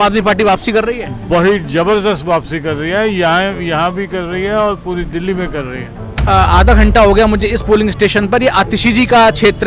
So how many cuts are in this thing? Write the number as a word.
one